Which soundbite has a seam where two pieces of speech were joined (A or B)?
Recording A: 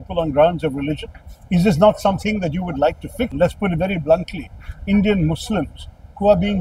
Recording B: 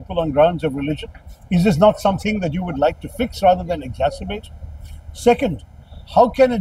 A